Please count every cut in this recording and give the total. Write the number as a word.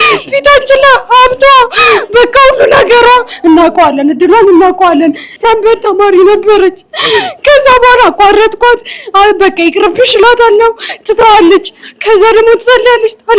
zero